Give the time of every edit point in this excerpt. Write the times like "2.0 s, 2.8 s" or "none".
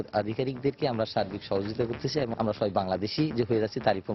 2.3 s